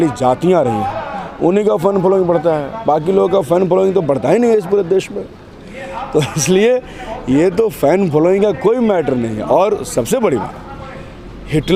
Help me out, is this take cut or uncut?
uncut